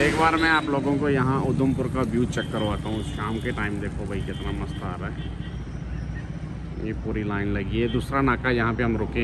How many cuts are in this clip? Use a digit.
0